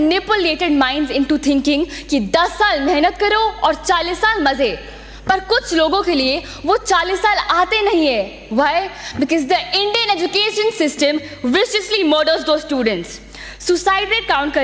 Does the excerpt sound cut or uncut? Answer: uncut